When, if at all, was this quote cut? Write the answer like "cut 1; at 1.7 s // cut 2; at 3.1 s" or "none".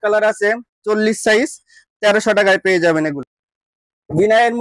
none